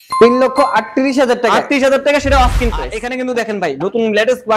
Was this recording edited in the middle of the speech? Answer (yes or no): yes